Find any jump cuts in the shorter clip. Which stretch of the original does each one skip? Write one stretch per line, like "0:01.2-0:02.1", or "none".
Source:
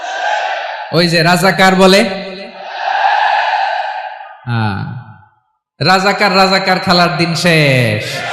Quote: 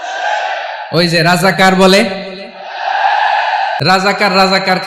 0:03.8-0:05.8